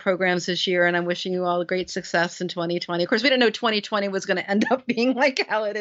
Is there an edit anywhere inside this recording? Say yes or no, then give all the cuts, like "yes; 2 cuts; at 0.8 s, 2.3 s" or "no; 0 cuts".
no; 0 cuts